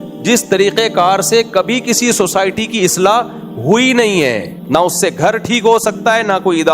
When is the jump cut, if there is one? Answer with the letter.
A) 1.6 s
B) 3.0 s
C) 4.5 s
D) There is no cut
C